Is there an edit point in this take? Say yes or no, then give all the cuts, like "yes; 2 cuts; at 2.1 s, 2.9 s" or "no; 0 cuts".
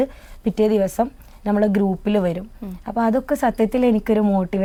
no; 0 cuts